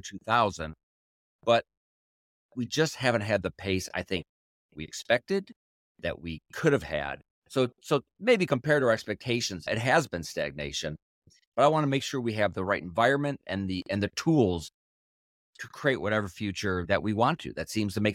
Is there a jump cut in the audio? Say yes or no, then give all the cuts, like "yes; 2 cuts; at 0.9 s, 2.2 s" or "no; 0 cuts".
yes; 2 cuts; at 9.7 s, 11.3 s